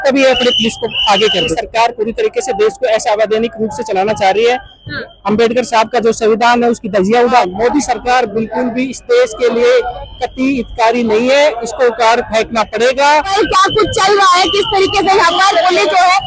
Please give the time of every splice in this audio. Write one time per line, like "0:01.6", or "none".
0:01.6
0:07.4
0:13.3